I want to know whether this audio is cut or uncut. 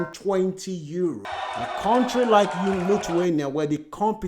cut